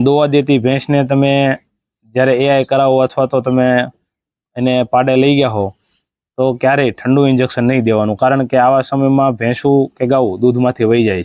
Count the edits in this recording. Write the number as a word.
zero